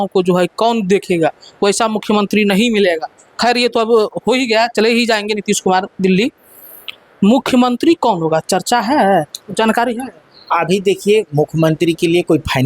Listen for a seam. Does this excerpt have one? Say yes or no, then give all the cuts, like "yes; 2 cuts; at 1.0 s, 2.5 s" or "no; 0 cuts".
no; 0 cuts